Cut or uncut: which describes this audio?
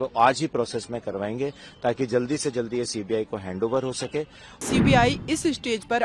cut